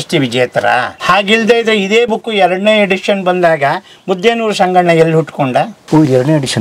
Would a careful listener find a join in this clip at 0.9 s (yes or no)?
yes